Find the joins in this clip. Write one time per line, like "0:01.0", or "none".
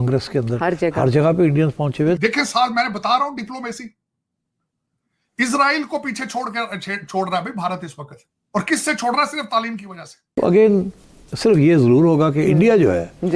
0:02.2
0:10.3